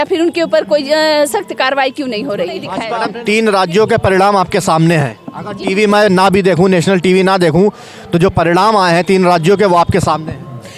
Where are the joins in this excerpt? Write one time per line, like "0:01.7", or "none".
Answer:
0:02.8